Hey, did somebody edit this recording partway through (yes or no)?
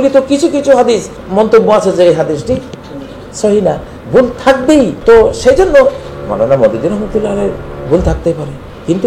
yes